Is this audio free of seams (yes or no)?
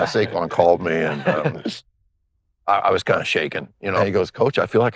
no